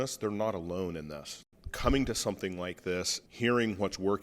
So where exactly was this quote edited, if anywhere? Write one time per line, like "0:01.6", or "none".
0:01.3
0:03.2

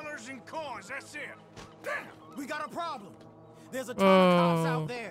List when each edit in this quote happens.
none

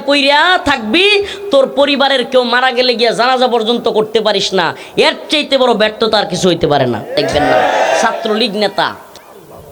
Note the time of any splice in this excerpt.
0:08.0

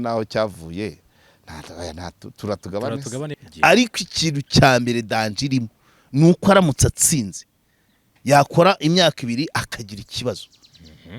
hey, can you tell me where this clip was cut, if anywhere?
0:03.4

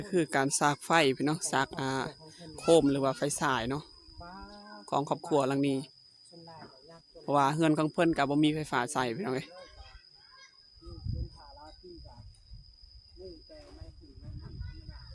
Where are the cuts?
none

